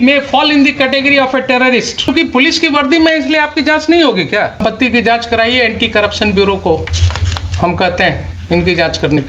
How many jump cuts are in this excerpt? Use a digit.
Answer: 2